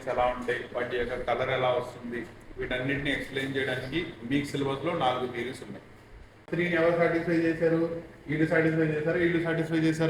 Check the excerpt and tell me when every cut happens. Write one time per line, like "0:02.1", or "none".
0:06.5